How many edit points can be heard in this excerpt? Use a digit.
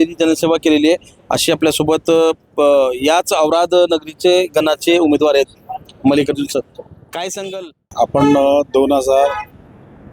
1